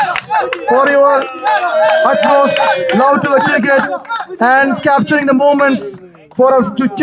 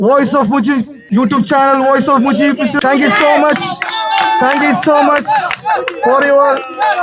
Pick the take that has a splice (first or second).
second